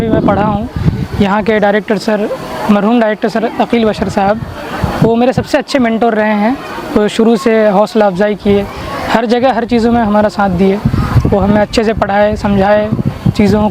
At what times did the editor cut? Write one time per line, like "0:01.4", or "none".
none